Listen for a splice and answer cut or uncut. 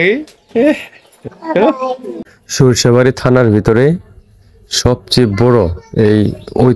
cut